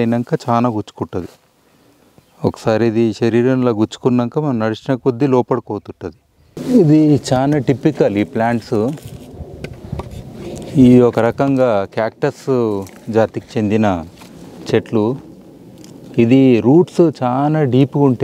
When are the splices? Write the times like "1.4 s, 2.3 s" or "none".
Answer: 6.5 s